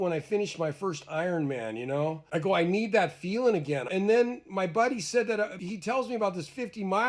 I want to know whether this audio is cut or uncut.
cut